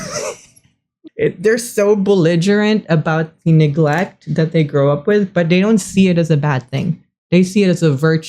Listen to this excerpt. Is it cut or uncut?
cut